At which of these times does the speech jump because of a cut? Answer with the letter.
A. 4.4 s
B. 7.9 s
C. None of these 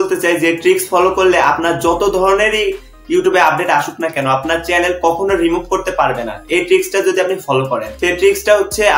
B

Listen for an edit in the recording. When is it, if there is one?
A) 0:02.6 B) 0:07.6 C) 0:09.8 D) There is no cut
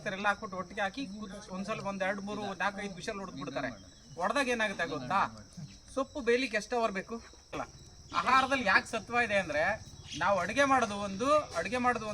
B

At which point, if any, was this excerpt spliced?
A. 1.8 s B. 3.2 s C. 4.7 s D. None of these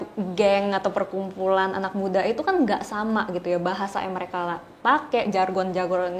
D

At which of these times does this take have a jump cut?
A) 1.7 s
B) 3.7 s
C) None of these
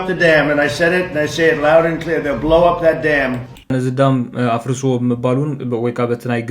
B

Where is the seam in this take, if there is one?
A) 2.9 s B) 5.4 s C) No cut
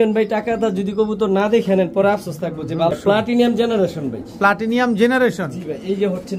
A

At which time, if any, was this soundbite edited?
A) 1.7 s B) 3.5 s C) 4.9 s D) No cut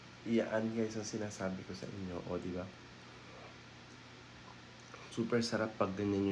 D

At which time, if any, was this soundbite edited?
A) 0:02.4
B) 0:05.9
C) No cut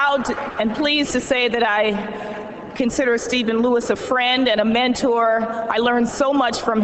B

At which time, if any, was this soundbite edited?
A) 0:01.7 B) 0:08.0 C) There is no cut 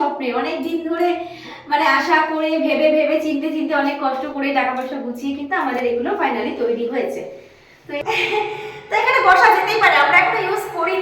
B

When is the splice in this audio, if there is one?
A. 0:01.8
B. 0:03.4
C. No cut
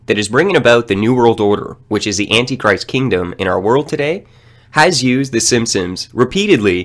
C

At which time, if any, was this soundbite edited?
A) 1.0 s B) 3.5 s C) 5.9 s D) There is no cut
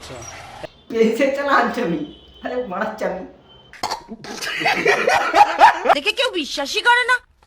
C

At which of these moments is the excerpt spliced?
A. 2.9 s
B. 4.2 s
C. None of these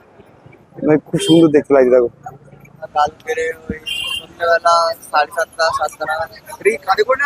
A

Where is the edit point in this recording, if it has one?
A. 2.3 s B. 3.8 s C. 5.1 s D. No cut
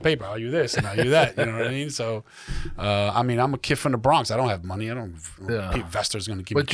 D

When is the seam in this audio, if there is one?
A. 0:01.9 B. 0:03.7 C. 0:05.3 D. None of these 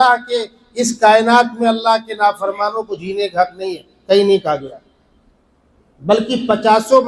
D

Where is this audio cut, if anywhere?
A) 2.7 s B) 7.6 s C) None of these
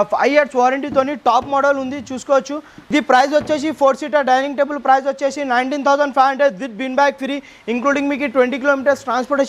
A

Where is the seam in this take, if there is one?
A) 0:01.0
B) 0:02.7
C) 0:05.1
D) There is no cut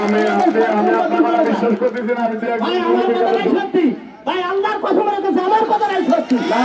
D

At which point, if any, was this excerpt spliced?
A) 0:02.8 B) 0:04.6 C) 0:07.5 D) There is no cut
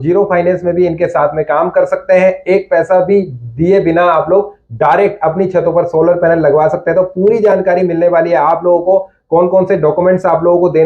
D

